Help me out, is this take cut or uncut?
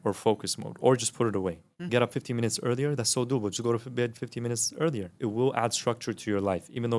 cut